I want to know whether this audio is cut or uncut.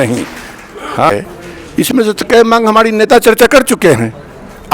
cut